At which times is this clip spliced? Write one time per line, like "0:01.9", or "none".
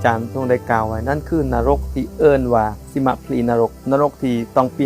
0:03.8